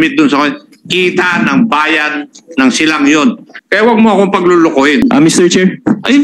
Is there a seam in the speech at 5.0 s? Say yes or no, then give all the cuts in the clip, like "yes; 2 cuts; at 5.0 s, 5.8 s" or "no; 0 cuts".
yes; 2 cuts; at 3.6 s, 5.0 s